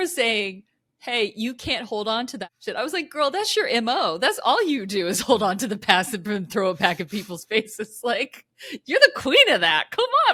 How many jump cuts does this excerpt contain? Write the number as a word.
zero